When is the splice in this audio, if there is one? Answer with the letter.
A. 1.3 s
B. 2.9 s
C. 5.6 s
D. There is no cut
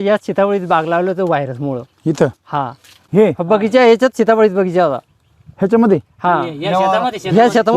B